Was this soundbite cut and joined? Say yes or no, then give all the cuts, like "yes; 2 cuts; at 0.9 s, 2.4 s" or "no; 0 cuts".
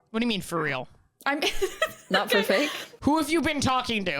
yes; 1 cut; at 3.0 s